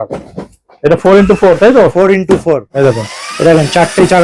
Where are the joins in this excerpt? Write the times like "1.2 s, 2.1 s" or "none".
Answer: 2.7 s